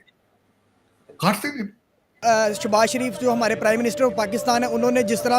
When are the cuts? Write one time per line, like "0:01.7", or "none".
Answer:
0:02.2